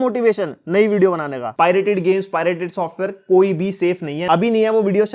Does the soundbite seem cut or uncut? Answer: cut